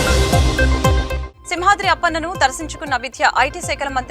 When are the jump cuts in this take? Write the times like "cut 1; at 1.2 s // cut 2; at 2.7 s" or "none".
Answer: cut 1; at 1.1 s